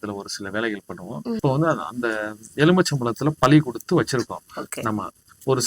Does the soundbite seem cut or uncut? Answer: cut